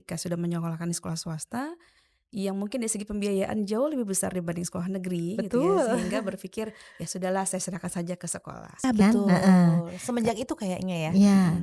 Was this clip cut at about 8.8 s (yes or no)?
yes